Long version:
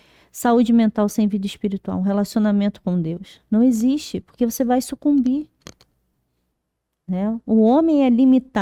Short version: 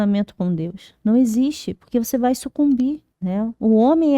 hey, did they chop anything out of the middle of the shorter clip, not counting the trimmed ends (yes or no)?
yes